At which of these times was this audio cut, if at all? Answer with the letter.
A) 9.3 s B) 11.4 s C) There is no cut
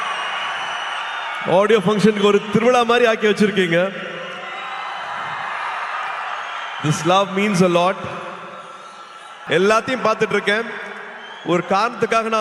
A